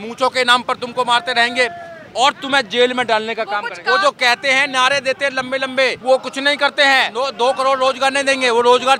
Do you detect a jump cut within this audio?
yes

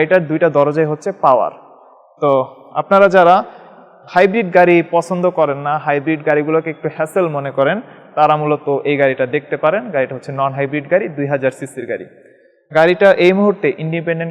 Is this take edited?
no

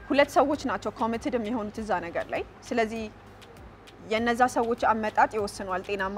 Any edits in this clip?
no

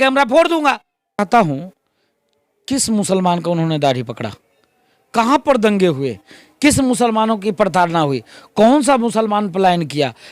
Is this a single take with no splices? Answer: no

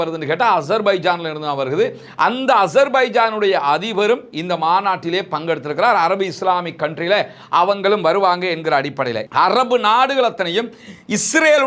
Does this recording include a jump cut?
yes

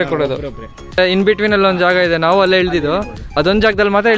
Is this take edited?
yes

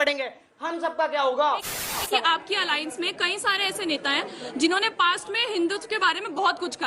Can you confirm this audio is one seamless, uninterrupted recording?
no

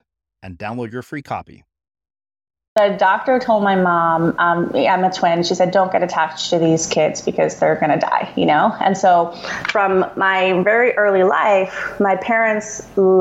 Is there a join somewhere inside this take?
yes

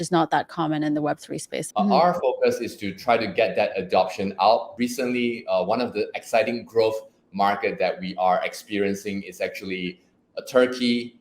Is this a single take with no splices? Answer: no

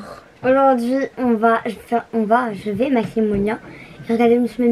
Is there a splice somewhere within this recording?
no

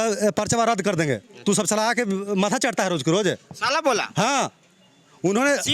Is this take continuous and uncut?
yes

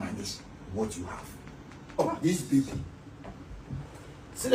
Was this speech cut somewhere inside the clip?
yes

